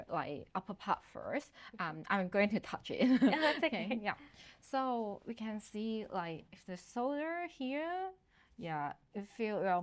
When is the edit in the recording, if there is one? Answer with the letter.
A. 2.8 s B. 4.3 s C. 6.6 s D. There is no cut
D